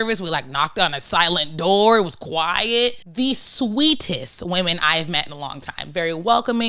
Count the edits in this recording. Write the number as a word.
one